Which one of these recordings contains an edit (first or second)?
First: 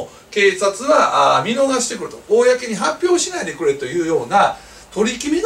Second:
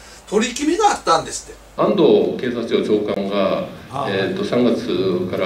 second